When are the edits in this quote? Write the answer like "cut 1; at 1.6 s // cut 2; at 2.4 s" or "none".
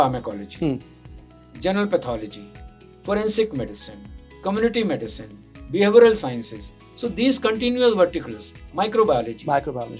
none